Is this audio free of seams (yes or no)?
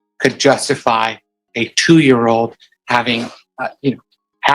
no